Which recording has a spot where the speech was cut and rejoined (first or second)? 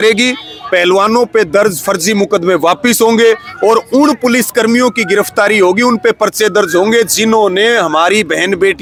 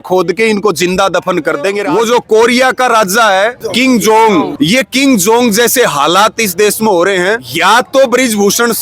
second